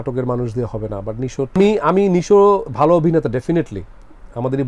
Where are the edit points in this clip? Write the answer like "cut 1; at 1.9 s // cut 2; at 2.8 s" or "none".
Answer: cut 1; at 1.6 s